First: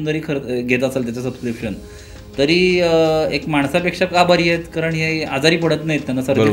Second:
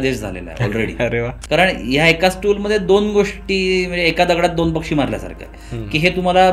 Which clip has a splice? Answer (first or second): second